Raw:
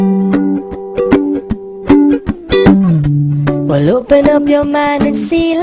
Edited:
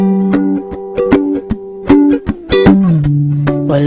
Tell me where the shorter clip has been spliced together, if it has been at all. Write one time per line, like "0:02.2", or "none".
none

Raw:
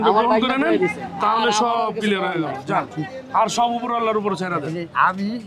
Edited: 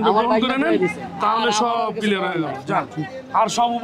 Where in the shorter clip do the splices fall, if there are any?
none

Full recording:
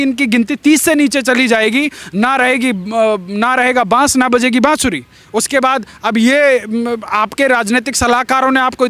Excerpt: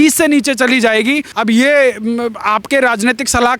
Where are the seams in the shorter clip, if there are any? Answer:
0:01.3

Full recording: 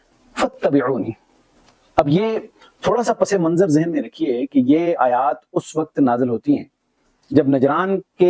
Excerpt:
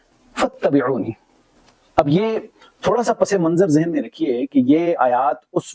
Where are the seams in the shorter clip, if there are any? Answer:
none

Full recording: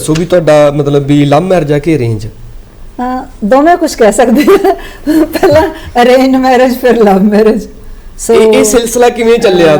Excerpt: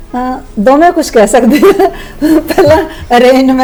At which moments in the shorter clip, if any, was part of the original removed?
none

